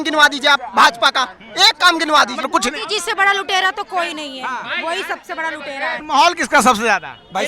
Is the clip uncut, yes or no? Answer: no